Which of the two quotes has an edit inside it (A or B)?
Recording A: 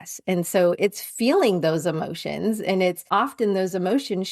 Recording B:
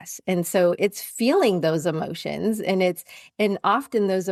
A